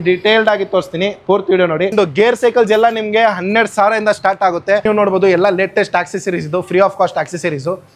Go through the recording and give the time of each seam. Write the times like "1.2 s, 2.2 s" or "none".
1.9 s, 4.9 s